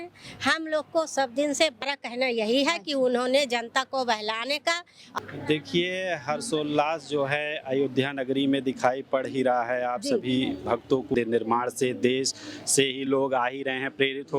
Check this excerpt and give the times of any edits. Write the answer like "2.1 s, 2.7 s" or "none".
1.8 s, 5.0 s, 11.1 s